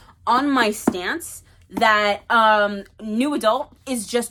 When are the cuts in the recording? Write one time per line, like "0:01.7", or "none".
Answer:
none